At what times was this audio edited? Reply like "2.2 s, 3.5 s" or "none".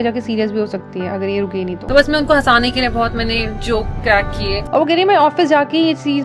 1.8 s, 4.6 s